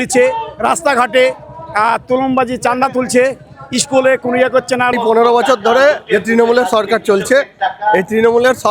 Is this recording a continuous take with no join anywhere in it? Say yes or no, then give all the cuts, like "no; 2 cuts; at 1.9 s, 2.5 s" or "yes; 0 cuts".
no; 1 cut; at 4.9 s